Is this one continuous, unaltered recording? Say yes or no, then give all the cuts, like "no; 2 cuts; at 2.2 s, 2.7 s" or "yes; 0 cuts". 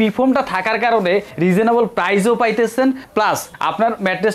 no; 2 cuts; at 1.3 s, 3.2 s